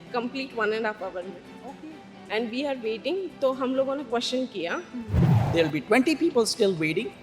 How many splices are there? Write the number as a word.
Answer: one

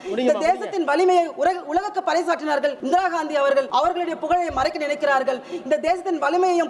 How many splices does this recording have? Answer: two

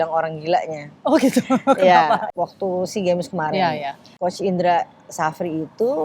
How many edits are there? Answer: two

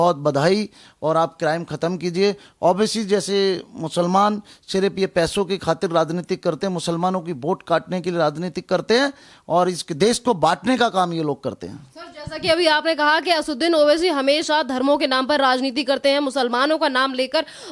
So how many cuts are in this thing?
zero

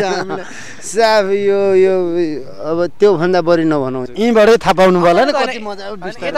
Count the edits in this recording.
one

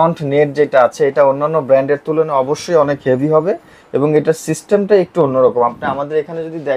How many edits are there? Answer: zero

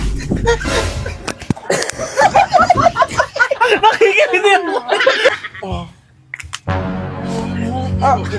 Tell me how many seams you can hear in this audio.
one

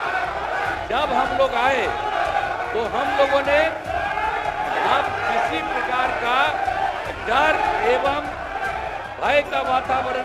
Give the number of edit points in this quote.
zero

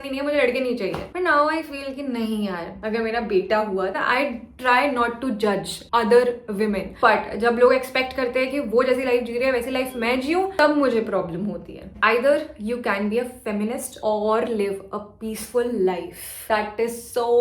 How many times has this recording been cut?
two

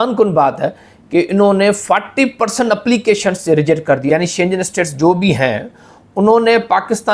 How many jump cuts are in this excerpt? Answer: one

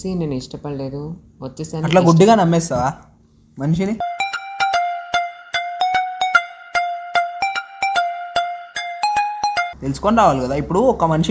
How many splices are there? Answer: one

